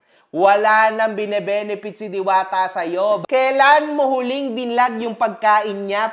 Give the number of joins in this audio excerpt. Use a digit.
1